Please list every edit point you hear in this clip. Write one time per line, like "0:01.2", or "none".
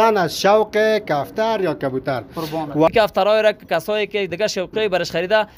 0:02.9